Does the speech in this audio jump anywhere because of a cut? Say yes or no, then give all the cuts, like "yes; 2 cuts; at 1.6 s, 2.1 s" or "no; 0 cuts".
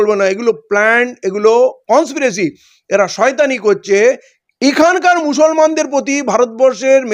no; 0 cuts